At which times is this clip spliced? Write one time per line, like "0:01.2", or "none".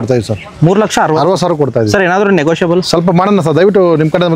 none